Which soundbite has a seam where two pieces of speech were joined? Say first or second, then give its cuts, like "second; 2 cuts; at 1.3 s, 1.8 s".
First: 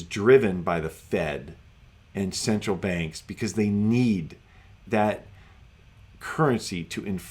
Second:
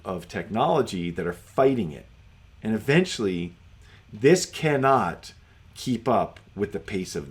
first; 1 cut; at 4.8 s